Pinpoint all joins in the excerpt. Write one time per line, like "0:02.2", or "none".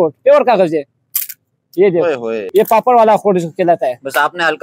0:02.4